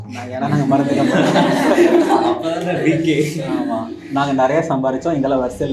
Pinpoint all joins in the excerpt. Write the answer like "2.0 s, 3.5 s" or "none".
none

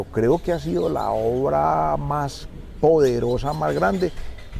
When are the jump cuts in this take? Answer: none

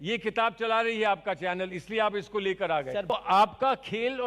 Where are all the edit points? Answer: 3.1 s

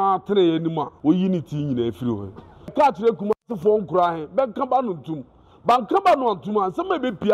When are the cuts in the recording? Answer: 0.9 s, 2.7 s

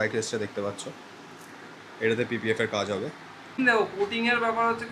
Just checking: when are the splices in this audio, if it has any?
3.6 s

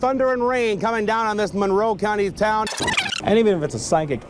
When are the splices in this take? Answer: 3.0 s

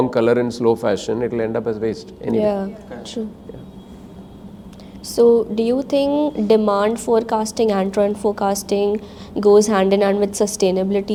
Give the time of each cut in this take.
none

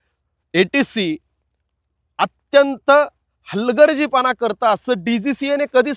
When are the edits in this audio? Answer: none

